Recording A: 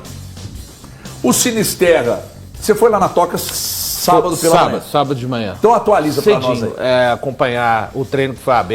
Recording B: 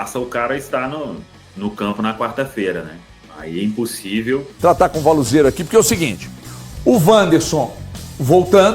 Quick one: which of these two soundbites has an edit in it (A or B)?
B